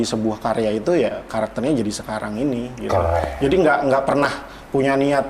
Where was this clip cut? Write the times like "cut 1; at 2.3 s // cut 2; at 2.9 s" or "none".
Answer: none